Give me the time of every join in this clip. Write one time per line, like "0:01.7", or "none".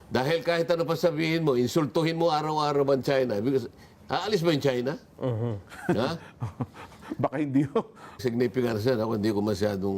0:08.2